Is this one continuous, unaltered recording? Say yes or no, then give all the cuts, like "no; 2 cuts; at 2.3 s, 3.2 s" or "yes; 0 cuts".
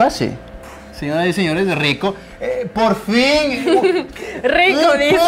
yes; 0 cuts